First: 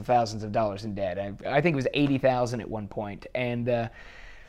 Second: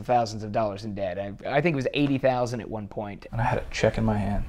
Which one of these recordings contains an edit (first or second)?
second